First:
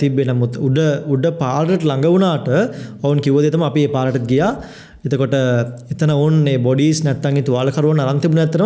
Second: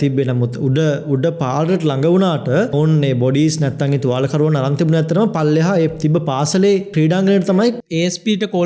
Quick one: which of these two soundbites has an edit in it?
second; 3 cuts; at 2.7 s, 6.9 s, 7.8 s

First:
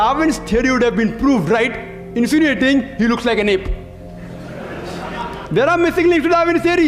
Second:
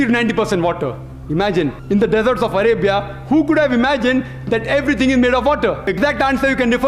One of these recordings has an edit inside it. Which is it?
second; 2 cuts; at 1.8 s, 5.9 s

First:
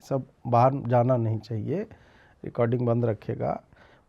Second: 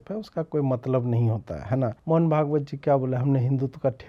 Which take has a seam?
second; 1 cut; at 2.0 s

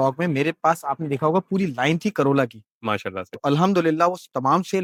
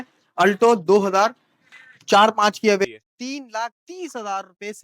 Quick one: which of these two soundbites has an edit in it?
second; 1 cut; at 2.9 s

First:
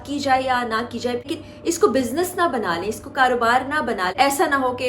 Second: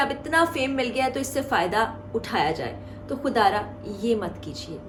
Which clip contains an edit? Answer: first; 2 cuts; at 1.3 s, 4.1 s

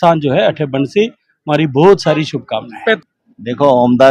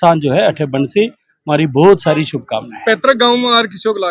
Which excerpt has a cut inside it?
first; 1 cut; at 3.0 s

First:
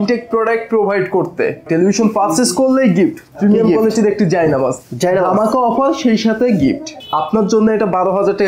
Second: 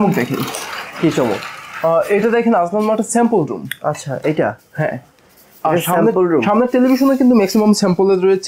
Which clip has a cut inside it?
first; 2 cuts; at 1.6 s, 6.9 s

